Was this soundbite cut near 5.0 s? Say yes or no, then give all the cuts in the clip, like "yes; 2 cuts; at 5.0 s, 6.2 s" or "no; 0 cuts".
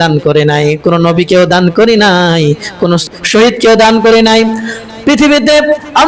no; 1 cut; at 3.1 s